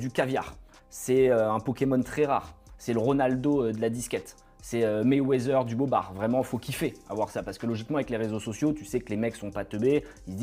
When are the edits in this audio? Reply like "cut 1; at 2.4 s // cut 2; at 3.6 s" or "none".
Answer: none